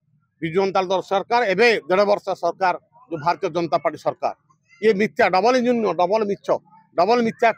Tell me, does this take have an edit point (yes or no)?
no